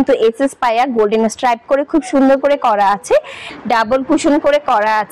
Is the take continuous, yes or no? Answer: no